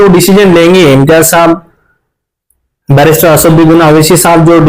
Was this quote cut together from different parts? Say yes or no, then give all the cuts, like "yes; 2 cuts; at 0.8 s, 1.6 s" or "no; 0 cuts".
no; 0 cuts